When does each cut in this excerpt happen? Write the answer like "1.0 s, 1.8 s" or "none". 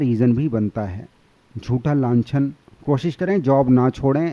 2.7 s